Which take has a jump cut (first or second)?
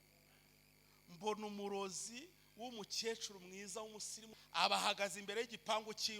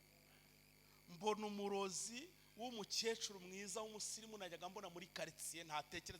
first